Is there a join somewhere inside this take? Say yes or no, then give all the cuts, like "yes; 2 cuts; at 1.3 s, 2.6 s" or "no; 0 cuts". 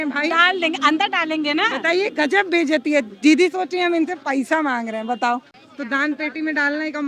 yes; 1 cut; at 5.6 s